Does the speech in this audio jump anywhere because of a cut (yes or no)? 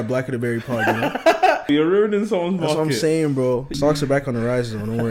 yes